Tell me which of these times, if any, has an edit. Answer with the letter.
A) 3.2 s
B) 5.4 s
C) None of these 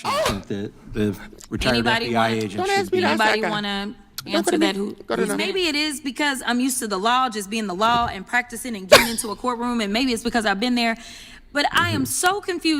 B